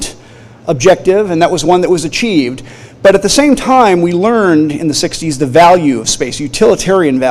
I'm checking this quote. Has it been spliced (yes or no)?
yes